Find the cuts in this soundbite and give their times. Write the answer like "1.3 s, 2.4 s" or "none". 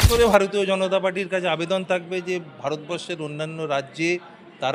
none